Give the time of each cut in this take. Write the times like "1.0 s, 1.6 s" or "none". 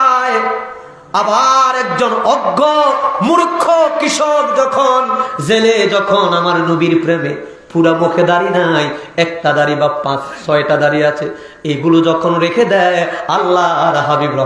none